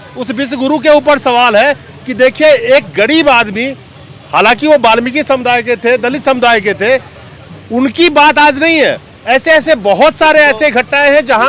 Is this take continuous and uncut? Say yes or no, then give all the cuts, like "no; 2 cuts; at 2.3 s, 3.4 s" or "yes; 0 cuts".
yes; 0 cuts